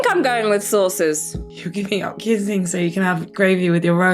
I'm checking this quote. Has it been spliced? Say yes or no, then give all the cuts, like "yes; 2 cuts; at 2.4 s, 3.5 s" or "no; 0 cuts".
yes; 1 cut; at 1.4 s